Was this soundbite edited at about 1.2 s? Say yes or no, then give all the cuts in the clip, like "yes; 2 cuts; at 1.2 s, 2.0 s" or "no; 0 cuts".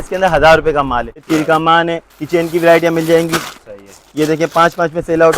yes; 1 cut; at 1.2 s